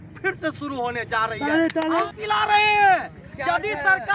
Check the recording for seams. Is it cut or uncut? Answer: cut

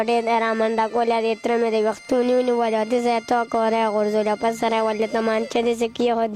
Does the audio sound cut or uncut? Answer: uncut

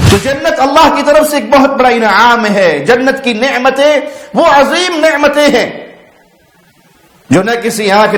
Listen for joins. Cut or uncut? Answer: uncut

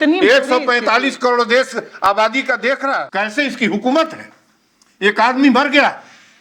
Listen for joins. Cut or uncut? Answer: cut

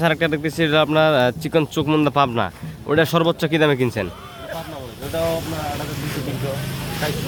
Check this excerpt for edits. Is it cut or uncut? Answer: uncut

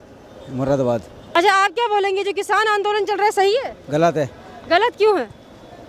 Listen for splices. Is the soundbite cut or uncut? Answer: uncut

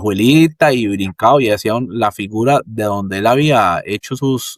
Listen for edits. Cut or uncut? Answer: uncut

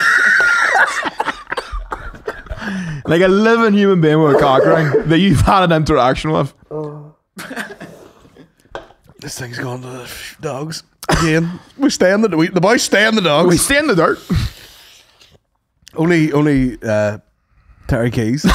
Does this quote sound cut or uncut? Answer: uncut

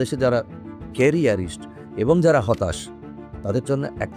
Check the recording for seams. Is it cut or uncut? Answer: uncut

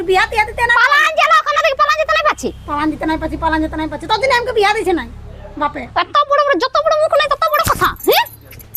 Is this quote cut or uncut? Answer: uncut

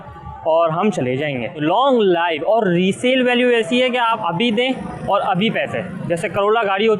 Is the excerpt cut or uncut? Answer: cut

